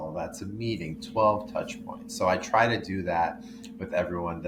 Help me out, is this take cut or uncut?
uncut